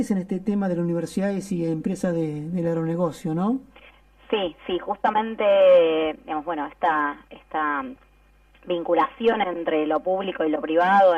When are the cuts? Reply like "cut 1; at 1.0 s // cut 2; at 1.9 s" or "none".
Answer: cut 1; at 9.1 s

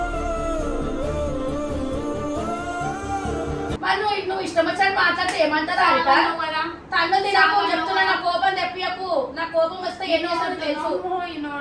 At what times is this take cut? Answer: none

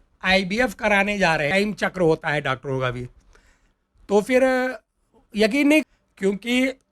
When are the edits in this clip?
cut 1; at 1.5 s // cut 2; at 5.8 s

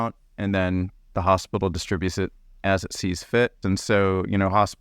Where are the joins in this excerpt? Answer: cut 1; at 3.6 s

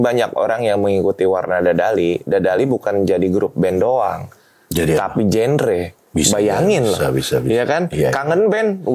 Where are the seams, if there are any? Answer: none

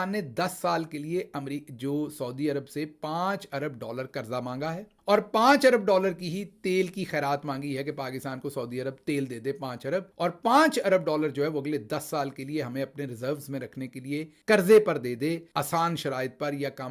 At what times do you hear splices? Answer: none

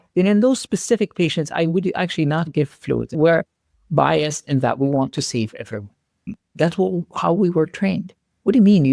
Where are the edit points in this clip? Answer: cut 1; at 3.1 s

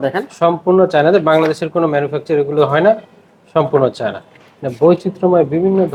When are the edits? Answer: none

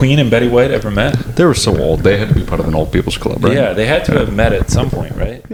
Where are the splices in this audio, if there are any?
none

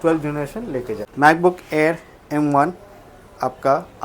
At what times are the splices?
cut 1; at 1.0 s

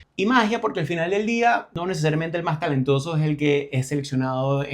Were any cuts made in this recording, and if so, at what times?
cut 1; at 1.7 s

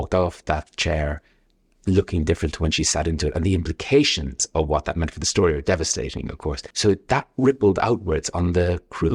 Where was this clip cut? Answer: cut 1; at 6.7 s

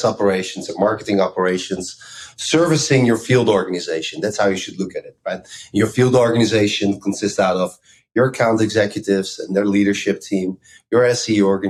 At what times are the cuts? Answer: none

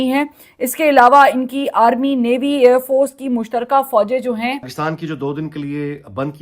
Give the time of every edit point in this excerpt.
cut 1; at 4.7 s

